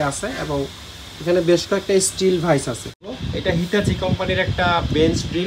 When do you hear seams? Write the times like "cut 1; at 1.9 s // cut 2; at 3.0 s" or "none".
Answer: cut 1; at 3.1 s

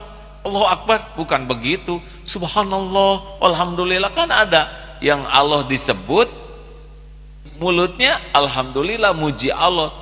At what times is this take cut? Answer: cut 1; at 7.4 s

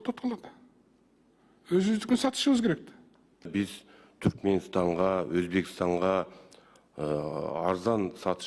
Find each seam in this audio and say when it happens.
cut 1; at 3.5 s

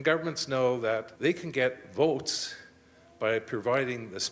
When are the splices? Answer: cut 1; at 1.1 s

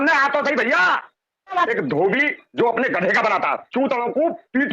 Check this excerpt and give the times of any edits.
cut 1; at 1.7 s

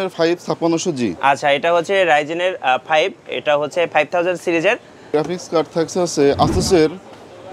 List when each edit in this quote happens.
cut 1; at 5.1 s

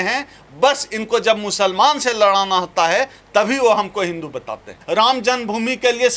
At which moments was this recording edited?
cut 1; at 4.8 s

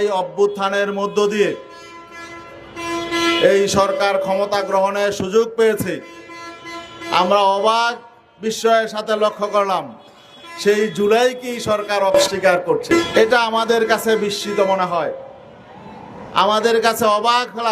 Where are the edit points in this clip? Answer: cut 1; at 12.3 s

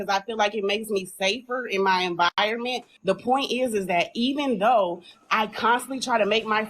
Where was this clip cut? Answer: cut 1; at 2.9 s

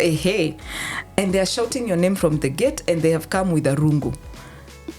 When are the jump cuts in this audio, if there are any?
cut 1; at 1.0 s

